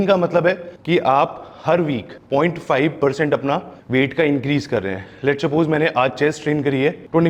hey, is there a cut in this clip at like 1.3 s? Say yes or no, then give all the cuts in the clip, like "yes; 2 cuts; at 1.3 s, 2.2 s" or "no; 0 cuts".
no; 0 cuts